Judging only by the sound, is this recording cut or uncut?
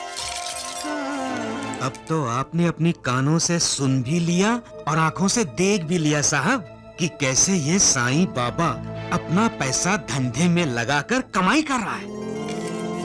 cut